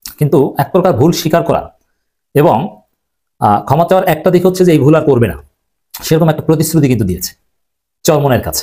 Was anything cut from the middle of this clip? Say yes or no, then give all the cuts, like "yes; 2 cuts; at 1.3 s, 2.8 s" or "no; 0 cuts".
no; 0 cuts